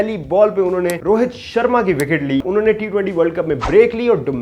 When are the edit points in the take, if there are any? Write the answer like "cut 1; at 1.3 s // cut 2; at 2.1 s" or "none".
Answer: cut 1; at 1.0 s // cut 2; at 2.4 s